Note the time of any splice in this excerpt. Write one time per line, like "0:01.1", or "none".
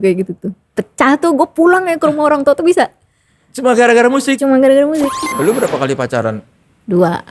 0:05.3